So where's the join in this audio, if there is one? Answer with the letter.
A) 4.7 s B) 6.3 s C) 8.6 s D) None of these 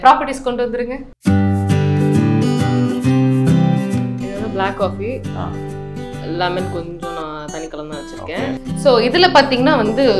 C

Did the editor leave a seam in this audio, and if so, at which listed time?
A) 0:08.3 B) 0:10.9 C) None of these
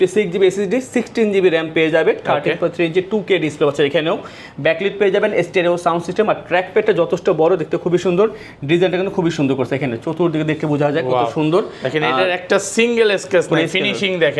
C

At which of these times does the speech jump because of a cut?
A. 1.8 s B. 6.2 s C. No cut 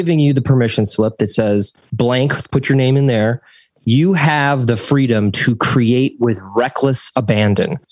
A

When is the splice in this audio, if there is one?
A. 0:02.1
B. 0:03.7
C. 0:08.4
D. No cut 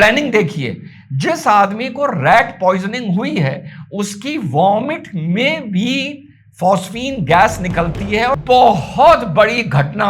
C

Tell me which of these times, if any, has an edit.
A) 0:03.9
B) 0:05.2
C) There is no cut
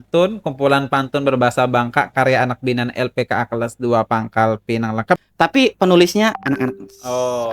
B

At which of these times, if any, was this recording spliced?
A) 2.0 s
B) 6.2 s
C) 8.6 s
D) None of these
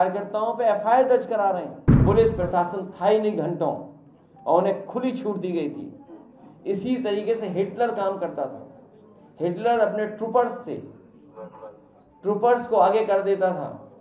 A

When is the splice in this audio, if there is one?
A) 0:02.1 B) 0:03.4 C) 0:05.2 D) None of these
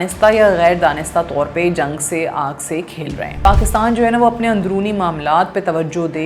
B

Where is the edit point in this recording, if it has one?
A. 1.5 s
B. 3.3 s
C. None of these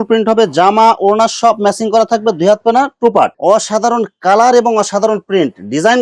B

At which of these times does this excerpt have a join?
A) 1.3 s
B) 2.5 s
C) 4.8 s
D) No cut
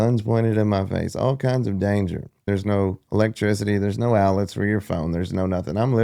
B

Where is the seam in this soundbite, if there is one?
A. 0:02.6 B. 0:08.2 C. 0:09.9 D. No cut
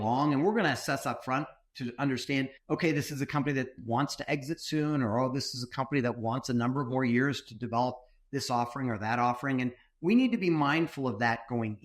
A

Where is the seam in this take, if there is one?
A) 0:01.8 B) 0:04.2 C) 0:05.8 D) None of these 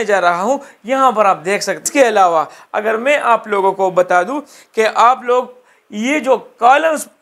A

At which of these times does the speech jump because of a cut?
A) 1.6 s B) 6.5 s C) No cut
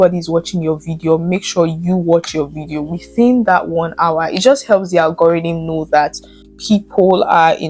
B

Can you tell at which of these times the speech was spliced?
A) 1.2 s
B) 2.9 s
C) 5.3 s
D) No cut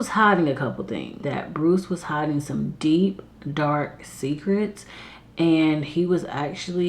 A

